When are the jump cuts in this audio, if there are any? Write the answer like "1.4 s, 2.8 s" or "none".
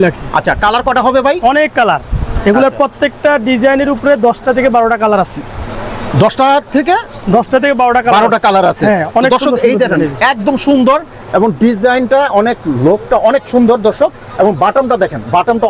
none